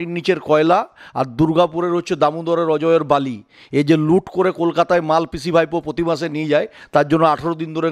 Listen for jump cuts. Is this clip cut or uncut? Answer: uncut